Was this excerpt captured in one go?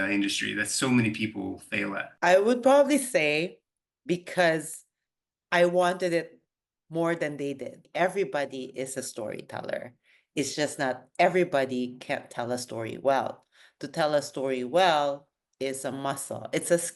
no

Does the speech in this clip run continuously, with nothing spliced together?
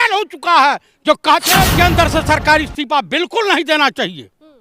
no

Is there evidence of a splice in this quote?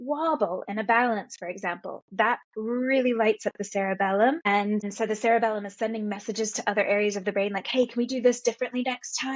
yes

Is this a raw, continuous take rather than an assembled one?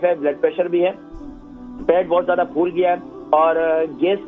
yes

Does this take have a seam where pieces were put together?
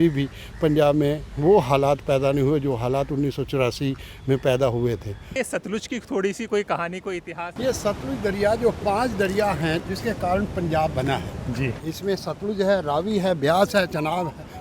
yes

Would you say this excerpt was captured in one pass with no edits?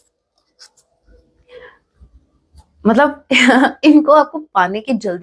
yes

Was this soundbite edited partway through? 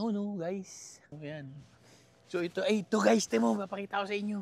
yes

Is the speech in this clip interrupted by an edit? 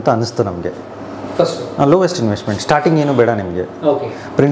no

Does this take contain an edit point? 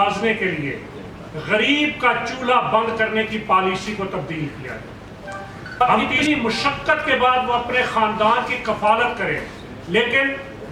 yes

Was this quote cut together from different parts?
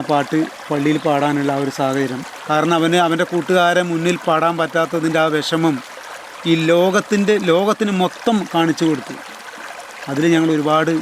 yes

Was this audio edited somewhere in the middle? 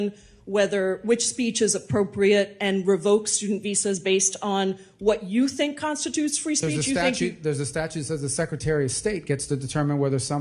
no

